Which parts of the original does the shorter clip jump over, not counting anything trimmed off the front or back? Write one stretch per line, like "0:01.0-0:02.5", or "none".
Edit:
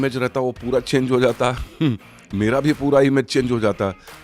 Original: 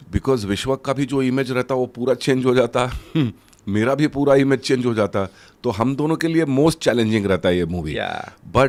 none